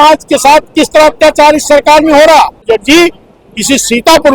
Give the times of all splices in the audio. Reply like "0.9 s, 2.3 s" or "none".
2.6 s